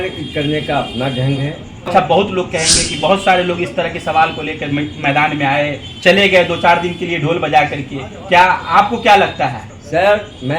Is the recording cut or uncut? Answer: cut